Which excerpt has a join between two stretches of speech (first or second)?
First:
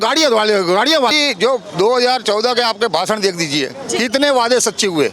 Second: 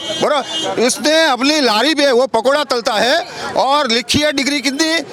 first